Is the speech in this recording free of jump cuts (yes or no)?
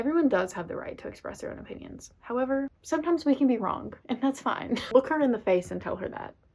no